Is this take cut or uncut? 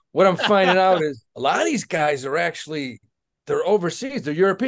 cut